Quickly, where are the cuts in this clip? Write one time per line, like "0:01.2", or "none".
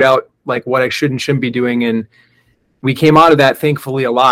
none